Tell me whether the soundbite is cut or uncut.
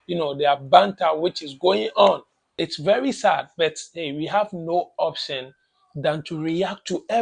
cut